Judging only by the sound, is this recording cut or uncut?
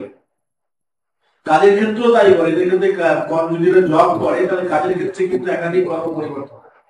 uncut